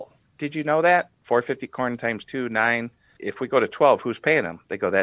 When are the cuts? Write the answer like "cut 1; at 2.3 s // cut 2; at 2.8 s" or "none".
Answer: cut 1; at 1.2 s // cut 2; at 3.1 s